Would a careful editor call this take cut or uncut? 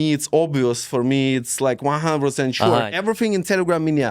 cut